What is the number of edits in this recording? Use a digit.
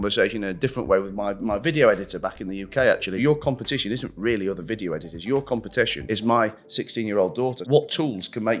3